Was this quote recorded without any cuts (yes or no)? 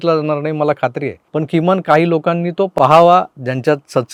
yes